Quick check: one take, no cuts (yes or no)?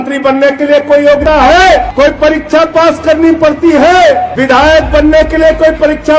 no